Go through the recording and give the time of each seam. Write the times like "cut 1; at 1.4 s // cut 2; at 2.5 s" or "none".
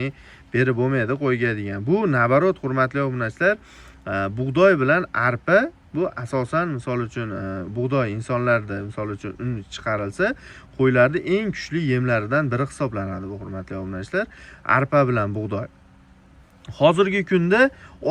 none